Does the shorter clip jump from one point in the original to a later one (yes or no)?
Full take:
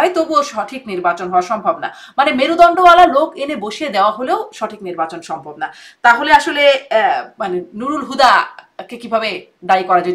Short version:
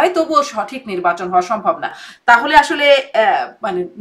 yes